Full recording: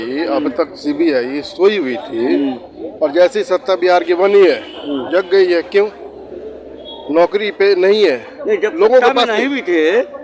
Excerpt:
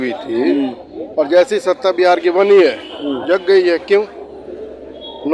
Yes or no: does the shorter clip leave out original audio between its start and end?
no